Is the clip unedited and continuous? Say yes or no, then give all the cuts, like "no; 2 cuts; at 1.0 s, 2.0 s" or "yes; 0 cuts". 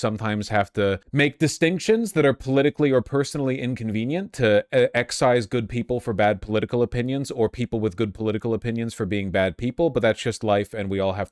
no; 1 cut; at 1.0 s